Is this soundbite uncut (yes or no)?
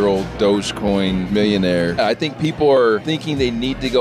no